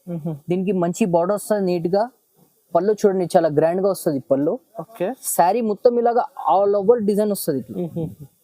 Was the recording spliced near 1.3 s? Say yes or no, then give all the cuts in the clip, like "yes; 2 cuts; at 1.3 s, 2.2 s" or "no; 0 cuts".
no; 0 cuts